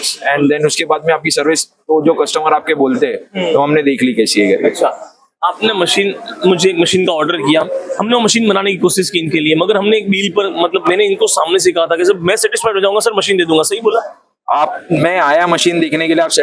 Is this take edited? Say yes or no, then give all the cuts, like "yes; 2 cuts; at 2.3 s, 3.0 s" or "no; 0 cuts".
no; 0 cuts